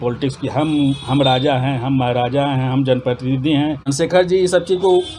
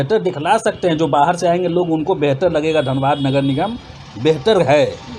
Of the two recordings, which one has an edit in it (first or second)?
first